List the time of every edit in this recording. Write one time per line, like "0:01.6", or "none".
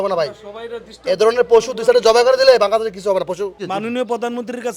0:03.6